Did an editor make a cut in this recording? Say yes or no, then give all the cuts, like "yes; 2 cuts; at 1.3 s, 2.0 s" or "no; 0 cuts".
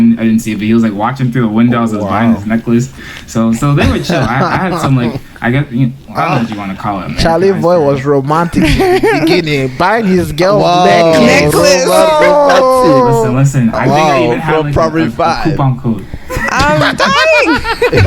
no; 0 cuts